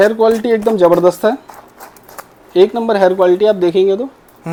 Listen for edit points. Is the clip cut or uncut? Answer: uncut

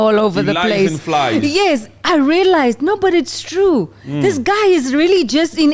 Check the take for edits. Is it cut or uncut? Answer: uncut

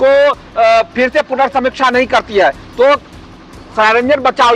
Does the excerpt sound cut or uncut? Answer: uncut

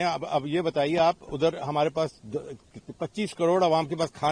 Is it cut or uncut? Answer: uncut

